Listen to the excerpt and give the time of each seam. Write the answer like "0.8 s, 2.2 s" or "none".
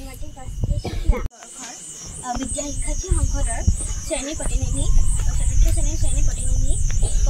1.4 s